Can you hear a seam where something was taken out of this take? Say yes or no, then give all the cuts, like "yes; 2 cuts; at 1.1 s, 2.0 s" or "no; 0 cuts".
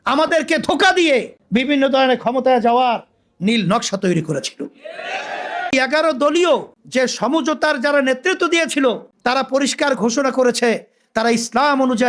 yes; 3 cuts; at 1.4 s, 5.7 s, 6.8 s